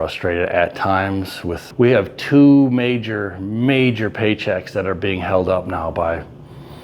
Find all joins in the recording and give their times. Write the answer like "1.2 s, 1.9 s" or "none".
1.6 s